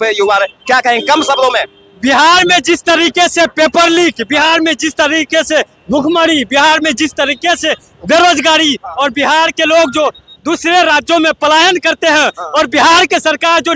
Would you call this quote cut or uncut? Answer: uncut